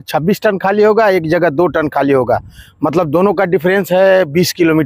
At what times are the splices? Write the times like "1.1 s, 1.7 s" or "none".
none